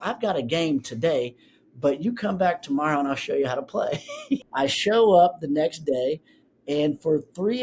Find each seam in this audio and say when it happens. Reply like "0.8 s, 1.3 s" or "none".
4.5 s